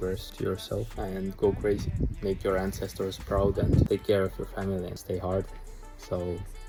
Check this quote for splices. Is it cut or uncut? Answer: uncut